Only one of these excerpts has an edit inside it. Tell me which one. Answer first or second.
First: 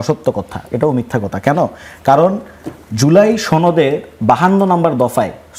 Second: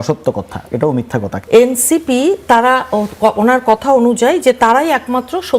second